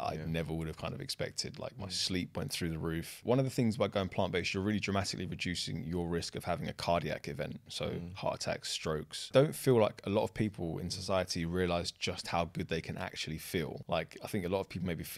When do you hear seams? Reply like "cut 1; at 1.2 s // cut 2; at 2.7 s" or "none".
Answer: cut 1; at 3.2 s // cut 2; at 9.3 s // cut 3; at 13.8 s